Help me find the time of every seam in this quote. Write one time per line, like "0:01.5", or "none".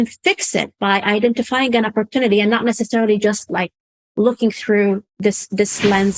none